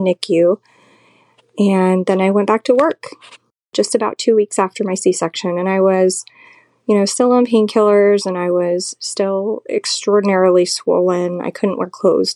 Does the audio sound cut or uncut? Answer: uncut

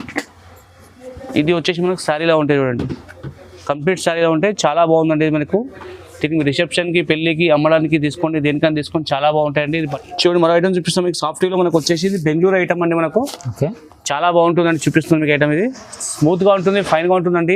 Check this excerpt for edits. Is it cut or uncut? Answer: cut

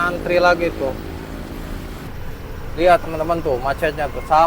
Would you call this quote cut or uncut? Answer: cut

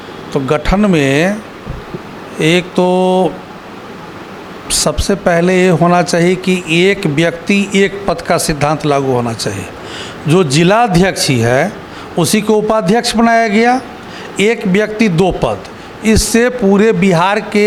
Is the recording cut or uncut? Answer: uncut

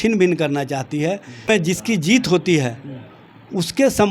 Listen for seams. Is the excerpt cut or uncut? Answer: cut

